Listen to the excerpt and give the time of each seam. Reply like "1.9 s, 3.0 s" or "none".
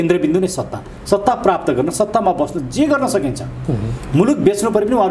none

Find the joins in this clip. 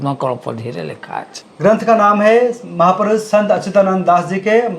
1.4 s

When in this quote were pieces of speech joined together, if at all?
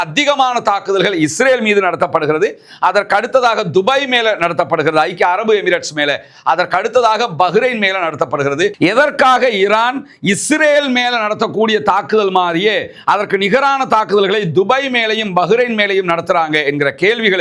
8.7 s

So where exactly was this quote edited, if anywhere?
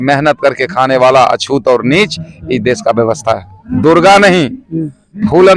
3.7 s

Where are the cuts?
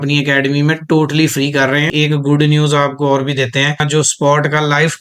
1.9 s, 3.8 s

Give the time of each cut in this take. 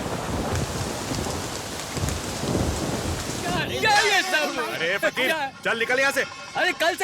3.6 s

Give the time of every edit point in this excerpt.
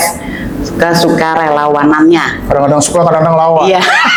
none

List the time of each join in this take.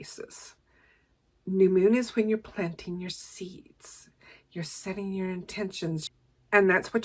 6.0 s

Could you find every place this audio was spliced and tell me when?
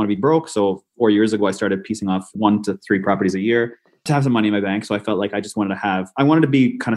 0.9 s, 2.3 s

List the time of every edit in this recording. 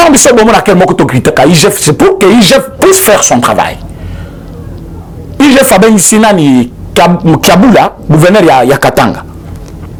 none

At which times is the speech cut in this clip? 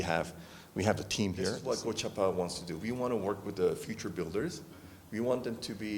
1.6 s

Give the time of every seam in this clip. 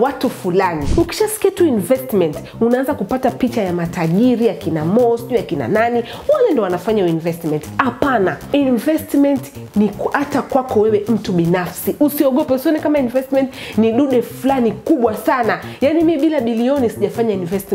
0.8 s, 8.4 s

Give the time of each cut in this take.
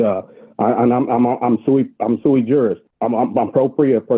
2.9 s

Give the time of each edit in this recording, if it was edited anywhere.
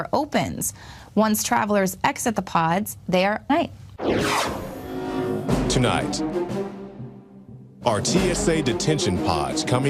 none

